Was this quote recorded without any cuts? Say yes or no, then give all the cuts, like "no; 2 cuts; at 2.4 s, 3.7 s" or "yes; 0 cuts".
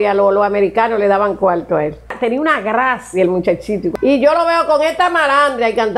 no; 2 cuts; at 2.1 s, 3.9 s